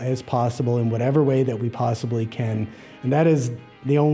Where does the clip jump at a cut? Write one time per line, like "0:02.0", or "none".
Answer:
none